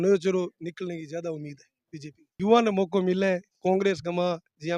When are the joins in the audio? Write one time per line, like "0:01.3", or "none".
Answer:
0:02.3